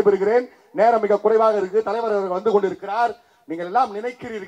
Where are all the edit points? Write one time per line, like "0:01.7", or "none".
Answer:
none